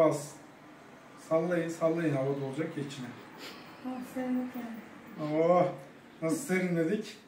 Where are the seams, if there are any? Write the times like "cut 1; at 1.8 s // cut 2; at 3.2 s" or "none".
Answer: none

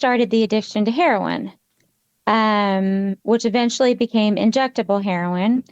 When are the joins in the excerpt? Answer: none

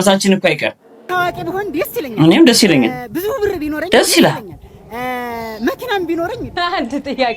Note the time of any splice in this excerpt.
cut 1; at 1.1 s // cut 2; at 6.6 s

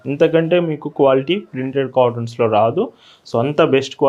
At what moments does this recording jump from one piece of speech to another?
none

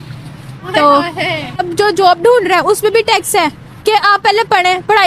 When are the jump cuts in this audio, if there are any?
cut 1; at 1.6 s

